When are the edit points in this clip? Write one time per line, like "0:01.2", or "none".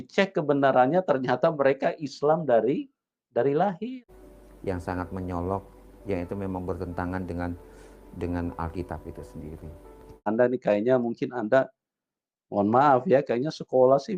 0:03.9
0:10.3